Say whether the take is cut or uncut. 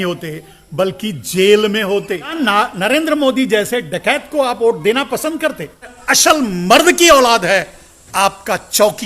cut